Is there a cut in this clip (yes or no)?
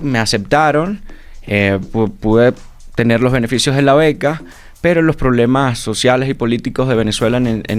no